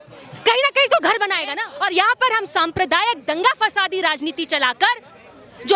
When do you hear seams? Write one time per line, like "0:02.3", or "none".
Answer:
0:01.7